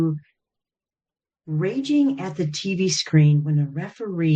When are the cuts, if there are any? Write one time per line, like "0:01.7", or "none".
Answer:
none